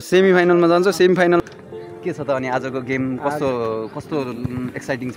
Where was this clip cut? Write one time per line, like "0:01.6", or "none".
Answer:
0:01.4